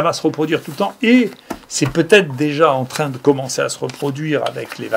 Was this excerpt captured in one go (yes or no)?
yes